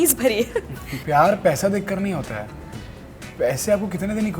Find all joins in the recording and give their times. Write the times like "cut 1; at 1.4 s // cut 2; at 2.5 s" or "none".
cut 1; at 1.0 s